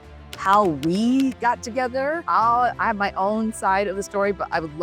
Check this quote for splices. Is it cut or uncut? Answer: cut